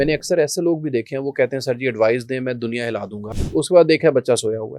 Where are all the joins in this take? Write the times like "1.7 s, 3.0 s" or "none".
3.3 s